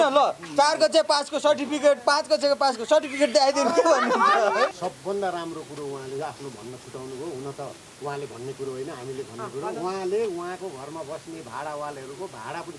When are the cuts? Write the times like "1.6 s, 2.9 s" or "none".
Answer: 4.7 s

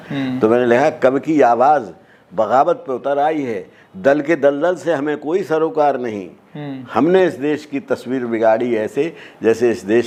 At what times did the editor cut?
none

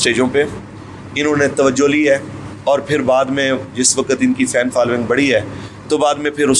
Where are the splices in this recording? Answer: none

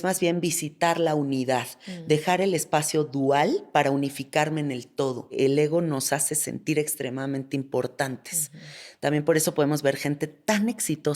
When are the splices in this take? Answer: 5.4 s

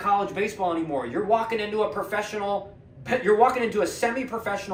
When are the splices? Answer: none

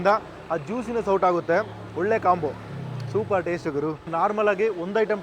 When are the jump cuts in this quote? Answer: 4.1 s

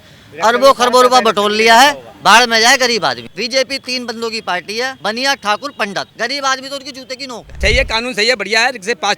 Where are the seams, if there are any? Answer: 3.3 s, 5.0 s, 6.1 s, 7.6 s

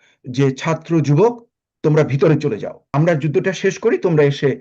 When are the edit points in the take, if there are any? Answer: 2.9 s

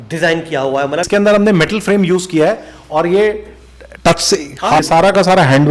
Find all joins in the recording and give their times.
1.1 s, 4.8 s

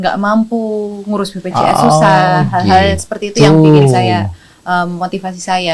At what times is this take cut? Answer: none

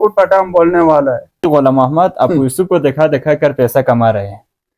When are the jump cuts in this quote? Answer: 1.3 s

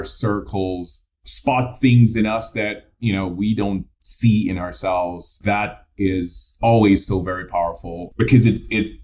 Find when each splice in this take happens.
1.2 s, 5.3 s, 8.0 s

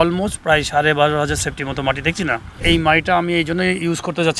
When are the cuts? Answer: 2.6 s

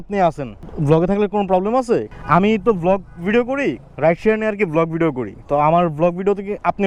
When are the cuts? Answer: none

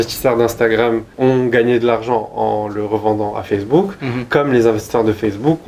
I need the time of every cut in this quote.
1.1 s

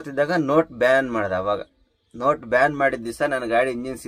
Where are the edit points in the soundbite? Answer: none

